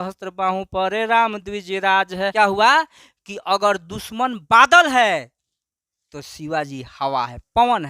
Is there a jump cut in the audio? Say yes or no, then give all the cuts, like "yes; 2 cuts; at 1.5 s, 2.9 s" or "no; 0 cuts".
yes; 1 cut; at 2.3 s